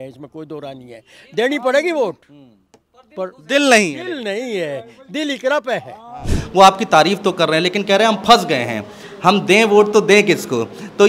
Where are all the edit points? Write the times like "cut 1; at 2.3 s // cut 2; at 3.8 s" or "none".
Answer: cut 1; at 6.3 s